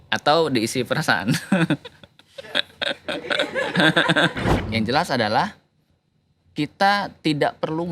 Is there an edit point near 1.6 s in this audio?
no; 1 cut; at 4.5 s

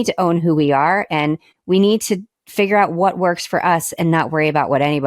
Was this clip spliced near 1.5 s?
yes; 1 cut; at 1.5 s

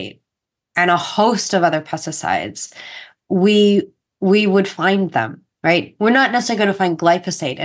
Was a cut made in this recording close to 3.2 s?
no; 0 cuts

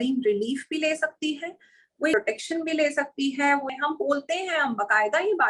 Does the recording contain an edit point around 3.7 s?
yes; 2 cuts; at 2.1 s, 3.7 s

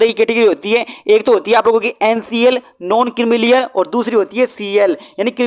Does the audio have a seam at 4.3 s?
no; 0 cuts

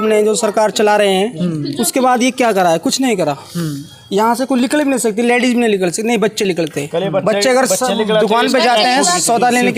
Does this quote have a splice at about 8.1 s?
no; 0 cuts

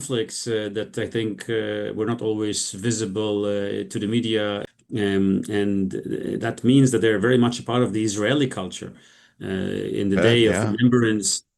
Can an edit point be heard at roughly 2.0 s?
no; 1 cut; at 4.7 s

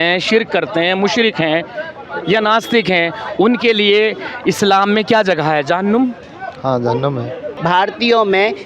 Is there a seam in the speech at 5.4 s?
no; 1 cut; at 7.5 s

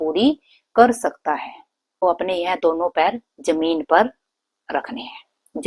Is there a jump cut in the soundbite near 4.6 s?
no; 1 cut; at 1.9 s

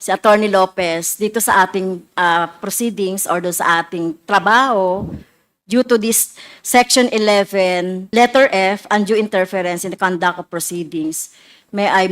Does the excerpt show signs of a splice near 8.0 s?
yes; 1 cut; at 8.0 s

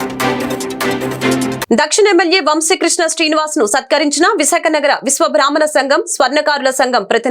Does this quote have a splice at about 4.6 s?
no; 1 cut; at 1.6 s

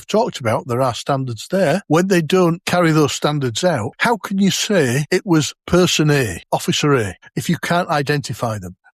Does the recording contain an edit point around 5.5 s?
yes; 6 cuts; at 1.8 s, 2.6 s, 3.9 s, 5.5 s, 6.4 s, 7.2 s

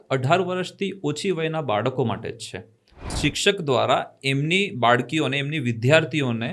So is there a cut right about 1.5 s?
no; 1 cut; at 3.1 s

